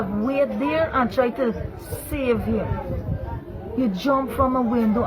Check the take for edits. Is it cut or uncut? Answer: uncut